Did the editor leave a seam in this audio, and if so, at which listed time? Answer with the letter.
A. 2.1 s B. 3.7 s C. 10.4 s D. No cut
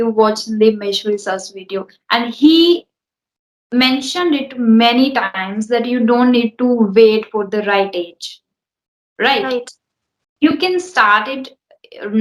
D